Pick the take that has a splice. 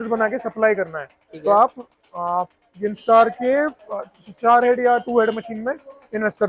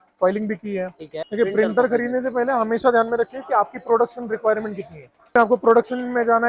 second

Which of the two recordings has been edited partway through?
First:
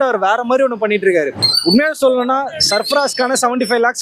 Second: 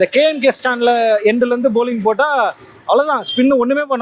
first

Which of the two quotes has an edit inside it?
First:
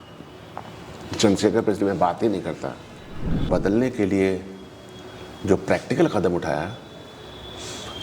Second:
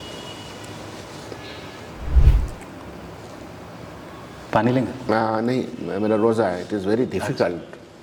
first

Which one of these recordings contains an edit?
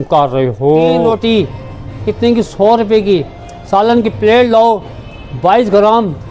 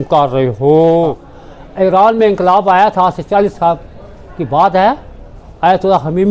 first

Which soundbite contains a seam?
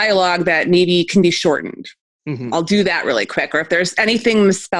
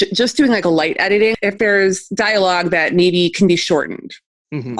second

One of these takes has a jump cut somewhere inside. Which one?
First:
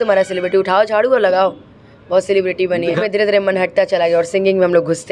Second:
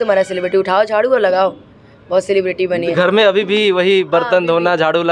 first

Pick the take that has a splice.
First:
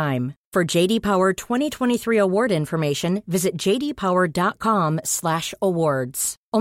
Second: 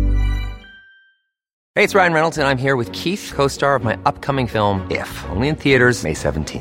second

